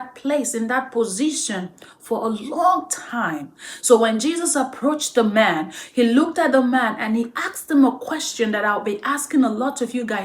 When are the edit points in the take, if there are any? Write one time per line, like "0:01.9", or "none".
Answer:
none